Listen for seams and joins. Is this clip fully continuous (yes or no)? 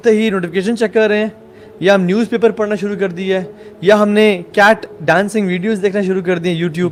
yes